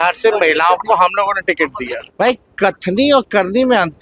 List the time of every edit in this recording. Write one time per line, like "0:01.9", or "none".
0:02.0